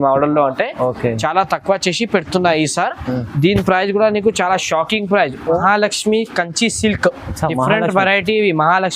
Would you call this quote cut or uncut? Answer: cut